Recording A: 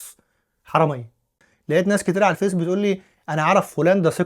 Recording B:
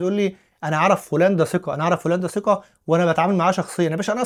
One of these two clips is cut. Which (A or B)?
A